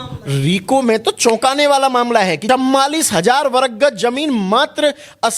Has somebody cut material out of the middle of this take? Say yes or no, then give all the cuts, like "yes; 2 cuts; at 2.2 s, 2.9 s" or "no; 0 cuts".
yes; 1 cut; at 2.4 s